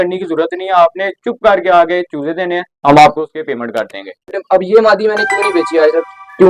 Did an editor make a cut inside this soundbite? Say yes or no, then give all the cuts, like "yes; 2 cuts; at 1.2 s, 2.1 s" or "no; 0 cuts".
yes; 1 cut; at 4.3 s